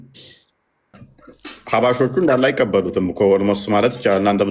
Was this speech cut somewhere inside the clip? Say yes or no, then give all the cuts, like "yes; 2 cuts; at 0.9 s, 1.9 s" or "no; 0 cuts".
yes; 1 cut; at 1.0 s